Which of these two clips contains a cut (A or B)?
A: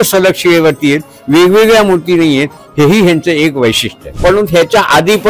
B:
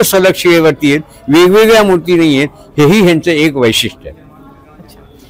A